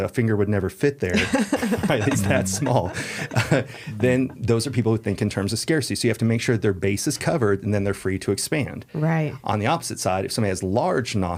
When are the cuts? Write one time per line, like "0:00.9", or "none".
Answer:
none